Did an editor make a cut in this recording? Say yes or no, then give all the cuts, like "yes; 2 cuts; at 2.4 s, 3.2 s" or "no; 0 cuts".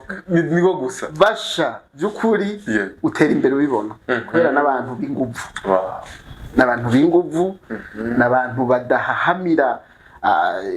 no; 0 cuts